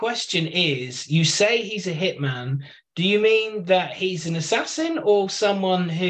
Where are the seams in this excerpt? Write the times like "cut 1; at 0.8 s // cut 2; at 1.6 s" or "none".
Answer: none